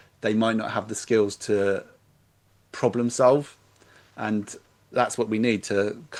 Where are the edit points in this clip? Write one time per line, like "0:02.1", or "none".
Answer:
none